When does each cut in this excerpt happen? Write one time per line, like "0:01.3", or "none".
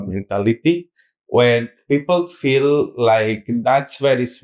none